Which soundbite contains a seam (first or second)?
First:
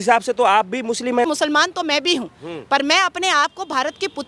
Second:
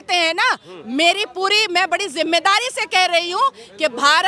first